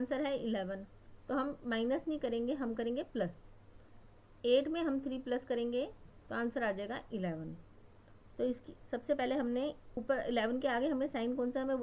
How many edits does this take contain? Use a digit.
2